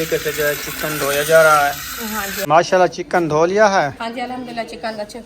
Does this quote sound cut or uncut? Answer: cut